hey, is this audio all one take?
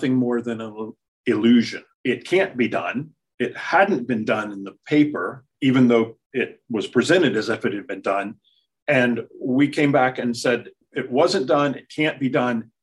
yes; 0 cuts

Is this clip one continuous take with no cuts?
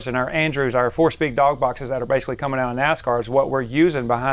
yes; 0 cuts

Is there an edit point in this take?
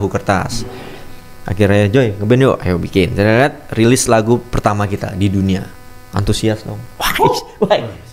no; 0 cuts

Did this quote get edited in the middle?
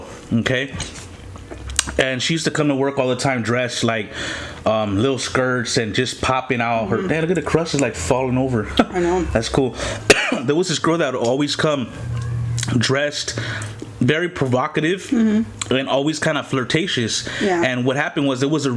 no; 0 cuts

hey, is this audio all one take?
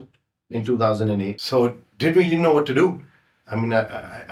yes; 0 cuts

